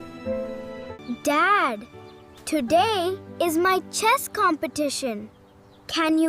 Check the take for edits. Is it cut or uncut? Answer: cut